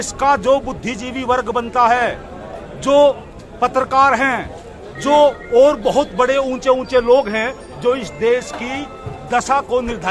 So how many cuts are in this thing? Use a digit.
0